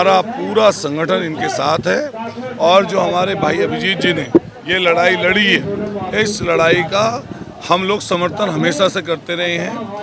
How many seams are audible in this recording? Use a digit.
0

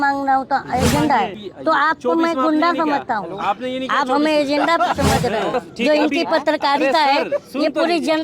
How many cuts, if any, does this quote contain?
2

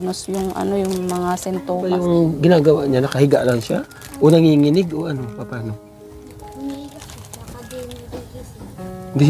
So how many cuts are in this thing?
2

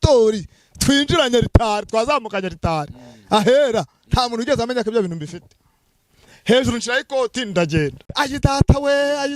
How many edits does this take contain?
1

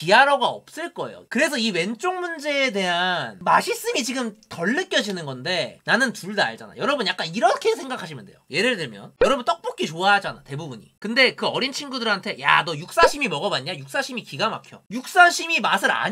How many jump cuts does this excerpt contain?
2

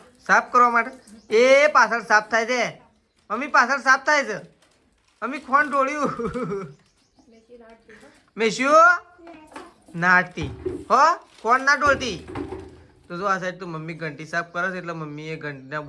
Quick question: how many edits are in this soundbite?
0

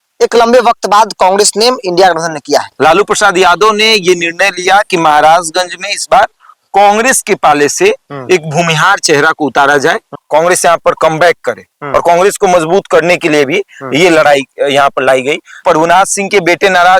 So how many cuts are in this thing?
3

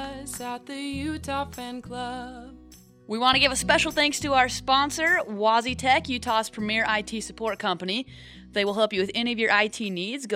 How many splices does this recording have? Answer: 1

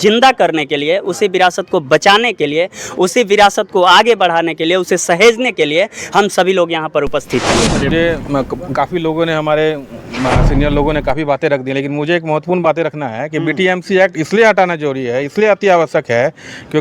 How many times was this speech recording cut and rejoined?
1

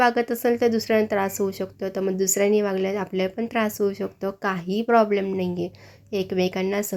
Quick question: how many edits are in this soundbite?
0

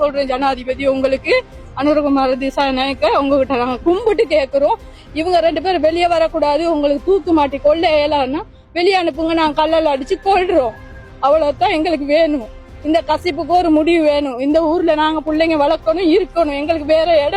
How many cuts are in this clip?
0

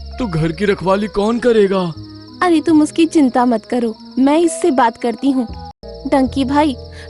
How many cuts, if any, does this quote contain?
1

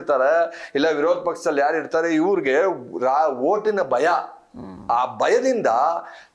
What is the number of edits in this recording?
0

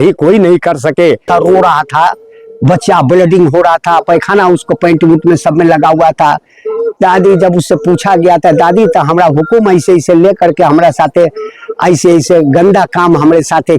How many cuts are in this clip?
1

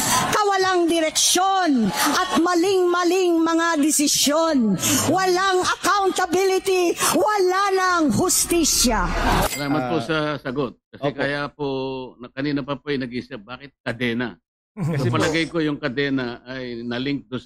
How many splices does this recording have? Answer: 1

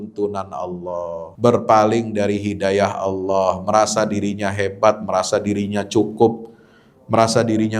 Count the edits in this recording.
1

